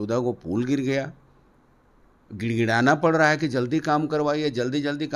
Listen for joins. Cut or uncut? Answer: uncut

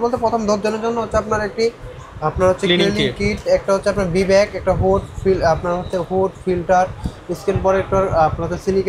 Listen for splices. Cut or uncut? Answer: uncut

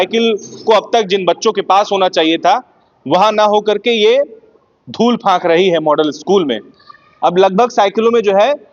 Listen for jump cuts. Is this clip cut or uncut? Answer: uncut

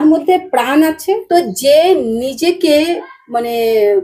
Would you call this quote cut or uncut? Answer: cut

